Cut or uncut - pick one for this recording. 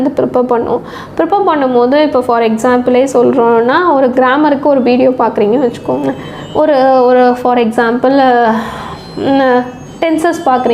uncut